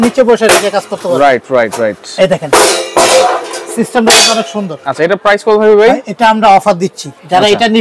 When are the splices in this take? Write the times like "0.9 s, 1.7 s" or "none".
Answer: none